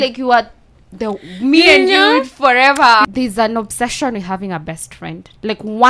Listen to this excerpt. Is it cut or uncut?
cut